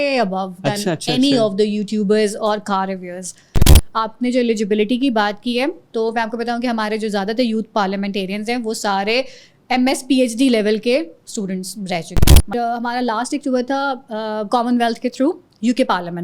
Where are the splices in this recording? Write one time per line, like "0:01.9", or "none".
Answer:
0:03.8
0:12.4